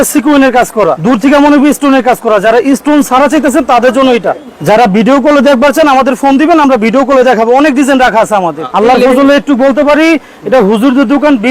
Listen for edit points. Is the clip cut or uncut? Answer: cut